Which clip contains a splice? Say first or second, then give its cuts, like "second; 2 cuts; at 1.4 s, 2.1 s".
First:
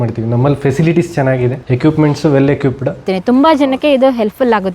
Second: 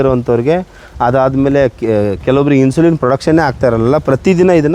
first; 2 cuts; at 1.6 s, 3.1 s